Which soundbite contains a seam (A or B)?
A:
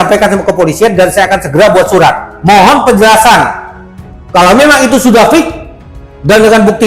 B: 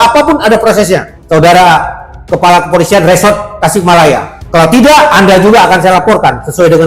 B